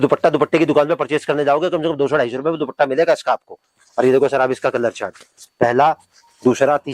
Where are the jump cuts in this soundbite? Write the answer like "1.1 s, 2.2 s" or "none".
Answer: none